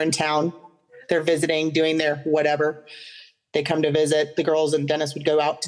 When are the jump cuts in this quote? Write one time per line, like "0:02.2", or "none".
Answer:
none